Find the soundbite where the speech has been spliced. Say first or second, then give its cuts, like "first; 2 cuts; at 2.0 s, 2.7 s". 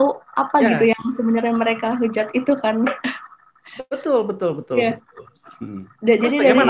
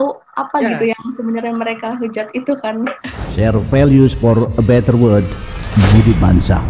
second; 1 cut; at 3.2 s